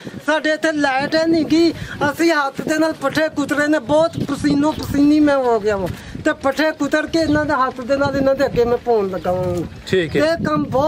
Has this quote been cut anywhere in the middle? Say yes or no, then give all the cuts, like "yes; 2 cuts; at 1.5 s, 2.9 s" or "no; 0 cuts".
no; 0 cuts